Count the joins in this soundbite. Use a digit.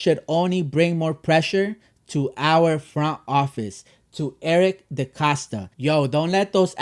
1